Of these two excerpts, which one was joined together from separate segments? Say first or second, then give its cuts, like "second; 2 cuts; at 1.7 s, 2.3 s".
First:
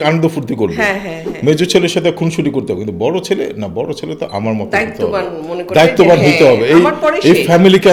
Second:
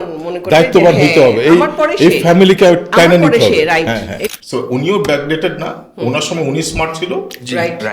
second; 1 cut; at 4.2 s